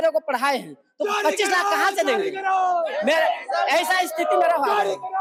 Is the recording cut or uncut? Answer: uncut